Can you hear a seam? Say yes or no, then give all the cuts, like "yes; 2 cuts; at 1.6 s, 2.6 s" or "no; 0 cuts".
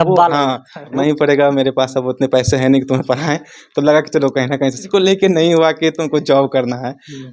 yes; 2 cuts; at 0.9 s, 4.9 s